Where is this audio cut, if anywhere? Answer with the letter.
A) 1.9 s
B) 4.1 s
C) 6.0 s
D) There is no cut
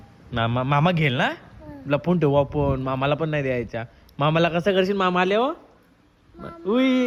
D